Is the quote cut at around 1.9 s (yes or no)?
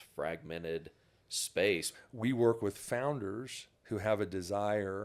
yes